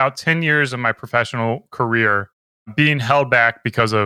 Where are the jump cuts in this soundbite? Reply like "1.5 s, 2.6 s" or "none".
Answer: none